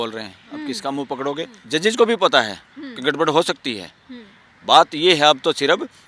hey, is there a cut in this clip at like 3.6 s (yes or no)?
no